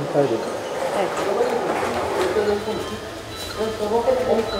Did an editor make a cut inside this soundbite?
no; 0 cuts

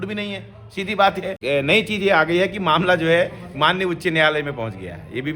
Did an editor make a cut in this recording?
yes; 1 cut; at 1.4 s

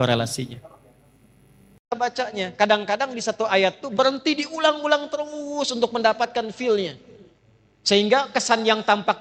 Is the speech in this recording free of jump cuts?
yes; 0 cuts

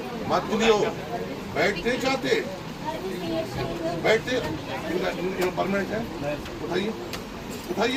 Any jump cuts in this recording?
no; 0 cuts

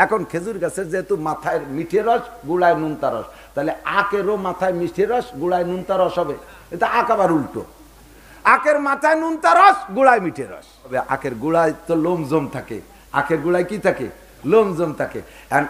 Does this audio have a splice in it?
yes; 1 cut; at 10.9 s

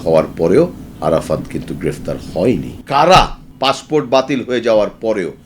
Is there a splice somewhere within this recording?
yes; 3 cuts; at 0.9 s, 2.8 s, 3.4 s

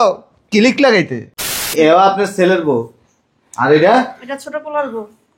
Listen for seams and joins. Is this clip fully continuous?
no; 1 cut; at 1.7 s

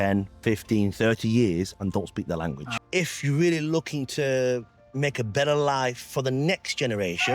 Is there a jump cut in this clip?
yes; 1 cut; at 2.7 s

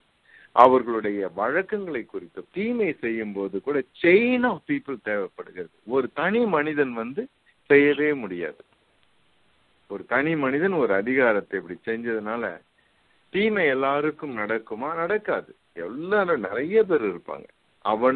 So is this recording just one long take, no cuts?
no; 1 cut; at 2.4 s

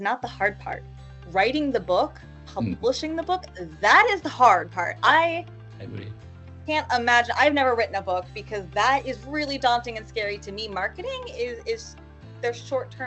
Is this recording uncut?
yes; 0 cuts

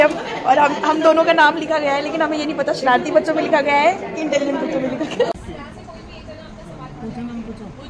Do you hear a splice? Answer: yes; 1 cut; at 5.4 s

